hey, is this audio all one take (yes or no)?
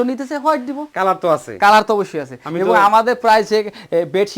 yes